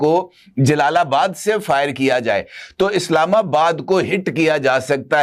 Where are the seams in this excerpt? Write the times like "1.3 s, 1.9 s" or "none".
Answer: none